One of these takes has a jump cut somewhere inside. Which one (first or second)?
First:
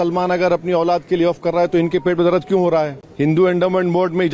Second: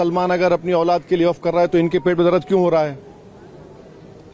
first